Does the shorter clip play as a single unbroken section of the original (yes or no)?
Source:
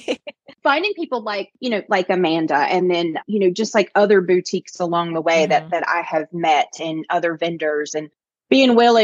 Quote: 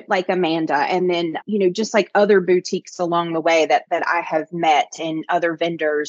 yes